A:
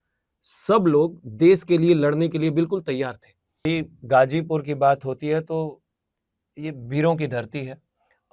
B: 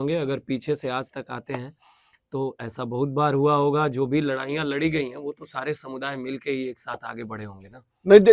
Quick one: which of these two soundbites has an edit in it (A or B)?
A